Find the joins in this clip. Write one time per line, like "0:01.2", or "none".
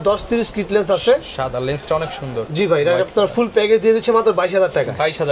none